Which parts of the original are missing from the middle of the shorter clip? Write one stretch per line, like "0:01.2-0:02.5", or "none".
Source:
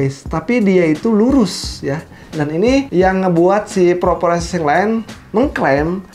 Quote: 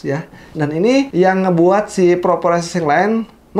none

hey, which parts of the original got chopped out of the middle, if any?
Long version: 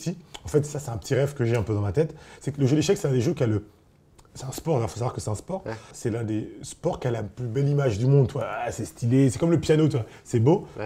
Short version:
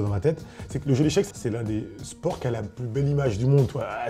0:03.0-0:05.9

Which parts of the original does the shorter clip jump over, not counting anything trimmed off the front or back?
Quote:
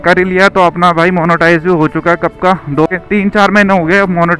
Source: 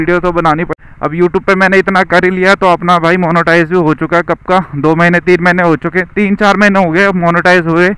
0:05.0-0:05.9

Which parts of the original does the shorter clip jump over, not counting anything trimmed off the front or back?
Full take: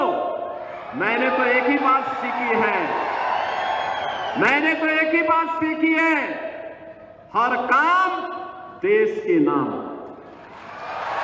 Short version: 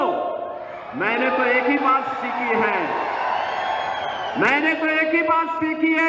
none

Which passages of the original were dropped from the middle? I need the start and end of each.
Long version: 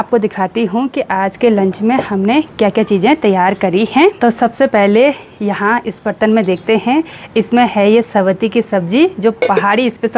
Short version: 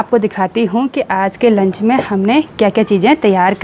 none

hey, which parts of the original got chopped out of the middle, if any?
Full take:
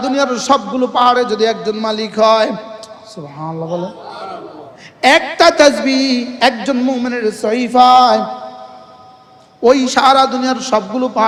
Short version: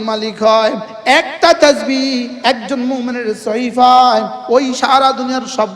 0:02.7-0:04.9
0:08.3-0:09.5

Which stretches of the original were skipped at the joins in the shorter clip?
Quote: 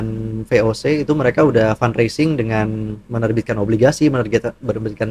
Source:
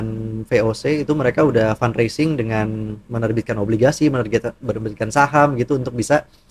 none

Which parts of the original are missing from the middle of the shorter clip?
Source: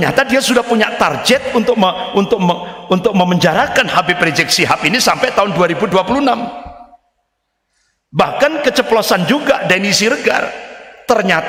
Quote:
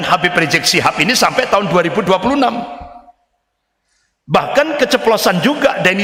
none

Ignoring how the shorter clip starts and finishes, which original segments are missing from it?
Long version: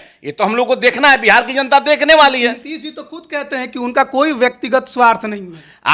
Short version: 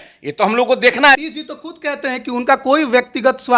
0:01.2-0:02.7

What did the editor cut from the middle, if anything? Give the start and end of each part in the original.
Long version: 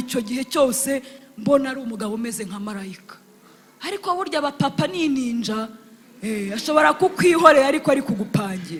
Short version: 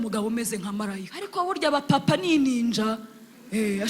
0:03.0-0:03.9

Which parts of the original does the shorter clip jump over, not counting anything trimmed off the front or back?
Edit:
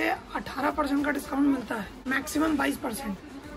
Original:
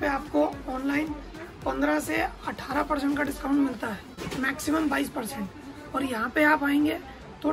0:04.1-0:04.3

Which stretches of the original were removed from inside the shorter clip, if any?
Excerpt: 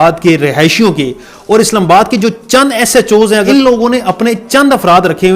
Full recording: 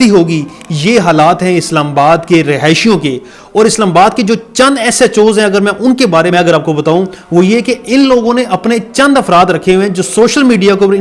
0:05.5-0:07.9

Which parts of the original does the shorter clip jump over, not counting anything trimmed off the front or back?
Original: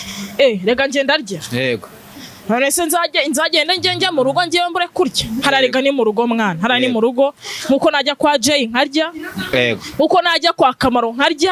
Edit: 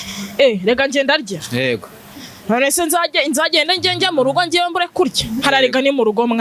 none

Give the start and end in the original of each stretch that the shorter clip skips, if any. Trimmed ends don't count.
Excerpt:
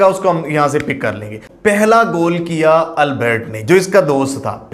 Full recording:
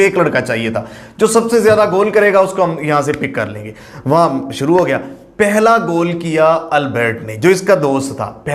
0:03.8-0:05.2

